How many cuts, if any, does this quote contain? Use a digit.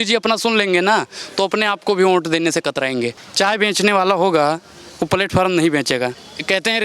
1